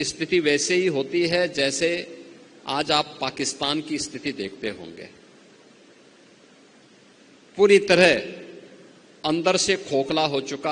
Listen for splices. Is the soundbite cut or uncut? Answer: uncut